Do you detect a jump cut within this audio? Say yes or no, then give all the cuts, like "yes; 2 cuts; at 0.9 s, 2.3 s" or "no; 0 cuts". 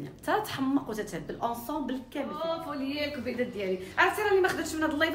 yes; 1 cut; at 2.4 s